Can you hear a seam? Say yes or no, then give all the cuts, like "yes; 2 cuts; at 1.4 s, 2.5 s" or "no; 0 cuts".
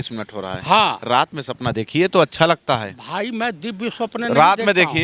no; 0 cuts